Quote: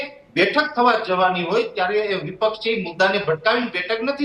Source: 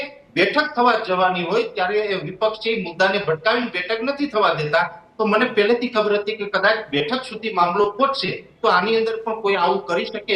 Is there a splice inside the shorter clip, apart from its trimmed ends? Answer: no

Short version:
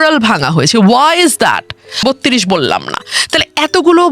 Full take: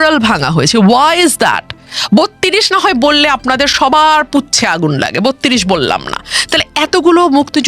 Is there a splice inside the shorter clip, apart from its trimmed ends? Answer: yes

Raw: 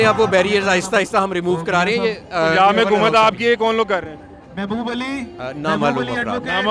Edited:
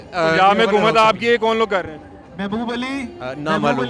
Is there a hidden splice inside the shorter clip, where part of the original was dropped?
no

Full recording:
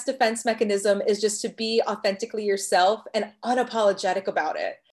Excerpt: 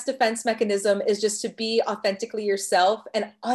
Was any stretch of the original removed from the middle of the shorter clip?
no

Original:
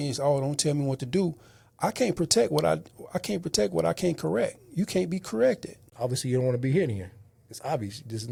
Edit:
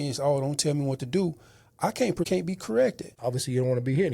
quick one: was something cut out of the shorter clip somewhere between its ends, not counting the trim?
yes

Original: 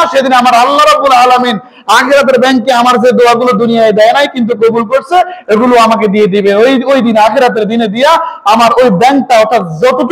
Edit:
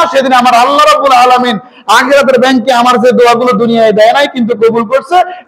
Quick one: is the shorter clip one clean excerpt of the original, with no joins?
yes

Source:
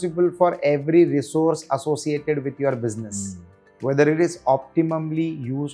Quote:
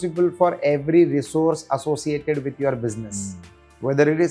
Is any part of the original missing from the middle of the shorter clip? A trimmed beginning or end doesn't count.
no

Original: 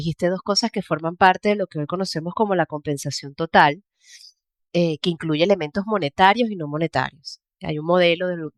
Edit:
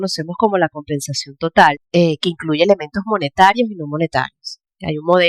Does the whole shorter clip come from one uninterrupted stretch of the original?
no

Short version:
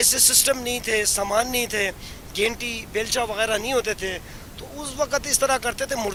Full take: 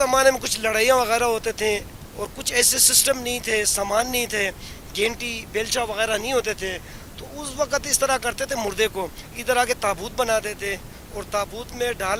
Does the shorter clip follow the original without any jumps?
yes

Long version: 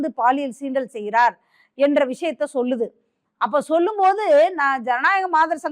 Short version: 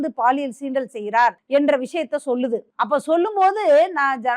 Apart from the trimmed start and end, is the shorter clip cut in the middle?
yes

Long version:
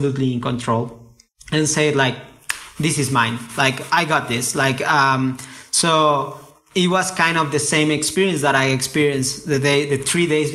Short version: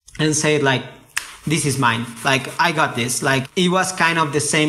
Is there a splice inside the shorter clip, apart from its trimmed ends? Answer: yes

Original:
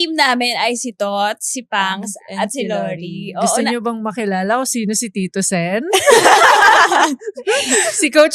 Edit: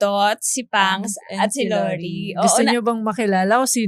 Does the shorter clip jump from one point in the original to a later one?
no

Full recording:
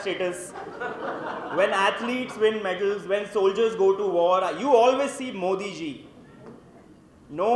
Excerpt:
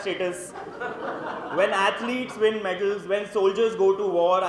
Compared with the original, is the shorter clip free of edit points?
yes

